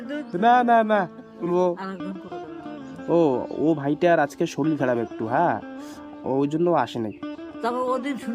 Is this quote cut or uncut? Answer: cut